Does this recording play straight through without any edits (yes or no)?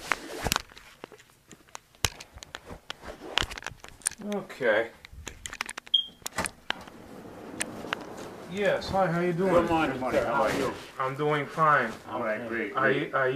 no